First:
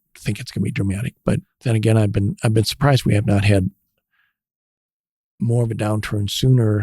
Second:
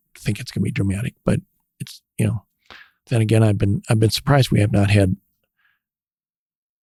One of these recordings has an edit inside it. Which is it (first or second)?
first